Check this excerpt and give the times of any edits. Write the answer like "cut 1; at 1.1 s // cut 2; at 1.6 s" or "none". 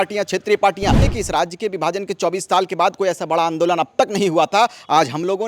cut 1; at 1.0 s